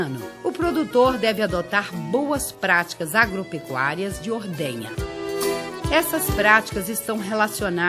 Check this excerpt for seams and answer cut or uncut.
cut